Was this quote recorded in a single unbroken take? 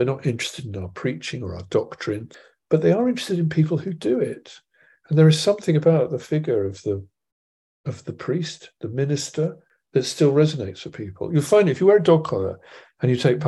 no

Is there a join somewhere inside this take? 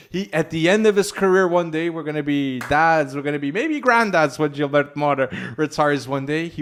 no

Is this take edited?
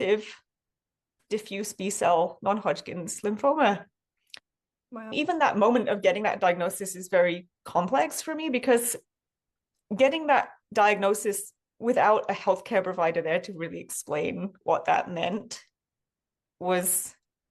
no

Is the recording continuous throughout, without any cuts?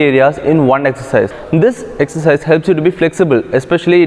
no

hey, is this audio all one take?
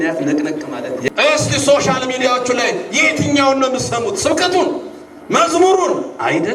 no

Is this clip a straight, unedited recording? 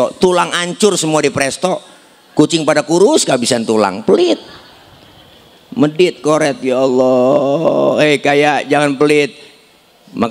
yes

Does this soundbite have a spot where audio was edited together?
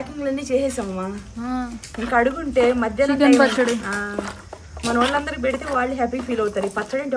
no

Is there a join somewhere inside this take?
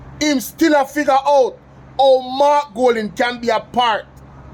no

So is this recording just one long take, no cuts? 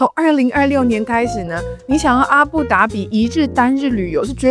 yes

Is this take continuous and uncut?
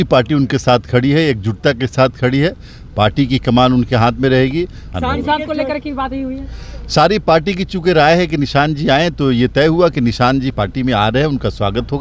no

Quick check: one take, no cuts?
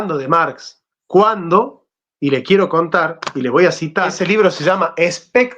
no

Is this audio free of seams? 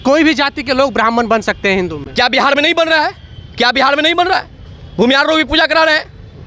yes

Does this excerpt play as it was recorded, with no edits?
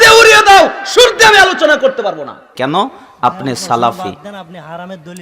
no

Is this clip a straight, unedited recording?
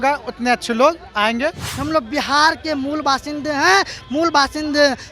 no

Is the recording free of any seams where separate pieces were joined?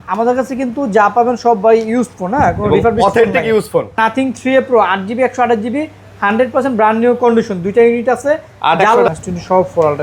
no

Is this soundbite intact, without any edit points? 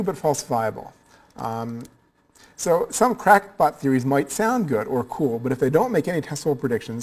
no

